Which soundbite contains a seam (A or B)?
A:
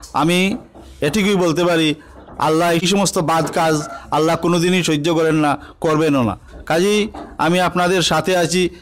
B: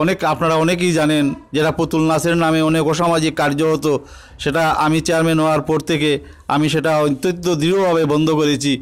A